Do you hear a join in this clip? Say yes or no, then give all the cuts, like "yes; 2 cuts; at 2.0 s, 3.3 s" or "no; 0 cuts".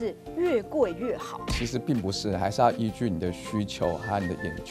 no; 0 cuts